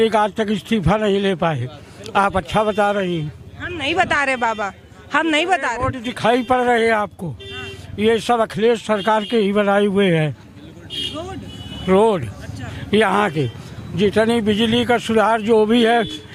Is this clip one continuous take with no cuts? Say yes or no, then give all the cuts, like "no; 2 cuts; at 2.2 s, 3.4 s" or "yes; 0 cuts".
yes; 0 cuts